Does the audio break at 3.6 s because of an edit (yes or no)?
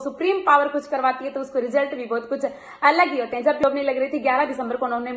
yes